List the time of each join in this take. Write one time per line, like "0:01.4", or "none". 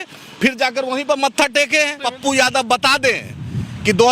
0:02.0